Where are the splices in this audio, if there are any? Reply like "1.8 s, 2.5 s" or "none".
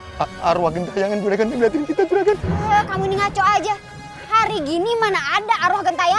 none